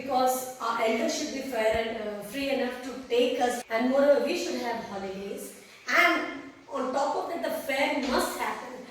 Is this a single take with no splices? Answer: no; 1 cut; at 3.6 s

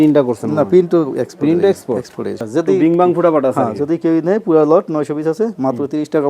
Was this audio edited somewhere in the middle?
yes; 1 cut; at 2.4 s

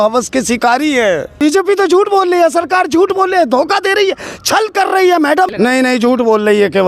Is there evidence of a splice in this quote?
yes; 2 cuts; at 1.4 s, 5.5 s

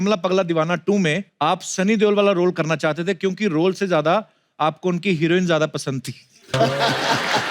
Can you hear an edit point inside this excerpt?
yes; 1 cut; at 1.3 s

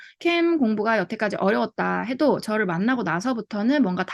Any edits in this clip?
no; 0 cuts

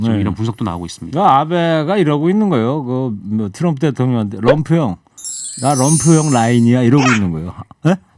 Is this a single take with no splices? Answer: yes; 0 cuts

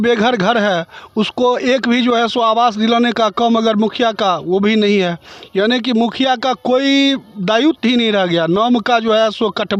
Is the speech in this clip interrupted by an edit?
no; 0 cuts

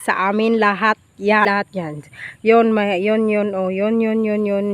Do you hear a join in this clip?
yes; 1 cut; at 1.5 s

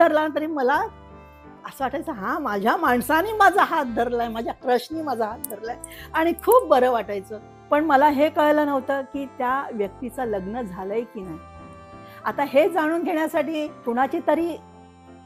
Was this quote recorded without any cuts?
yes; 0 cuts

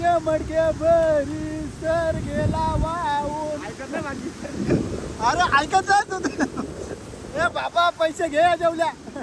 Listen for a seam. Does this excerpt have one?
no; 0 cuts

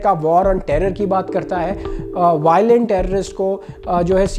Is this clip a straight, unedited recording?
no; 1 cut; at 1.9 s

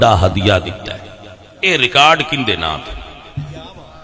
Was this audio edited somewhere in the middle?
no; 0 cuts

